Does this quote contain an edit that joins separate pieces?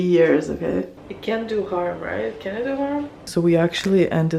yes; 2 cuts; at 1.0 s, 3.3 s

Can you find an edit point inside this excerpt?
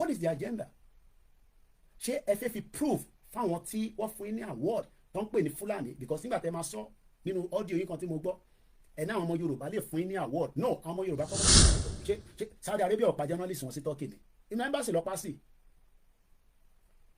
yes; 1 cut; at 11.6 s

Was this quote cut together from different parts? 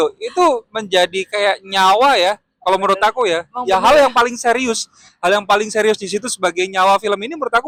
no; 0 cuts

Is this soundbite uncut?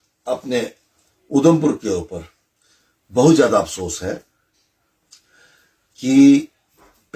yes; 0 cuts

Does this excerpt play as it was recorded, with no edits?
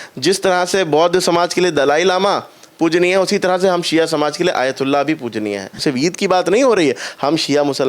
no; 1 cut; at 5.8 s

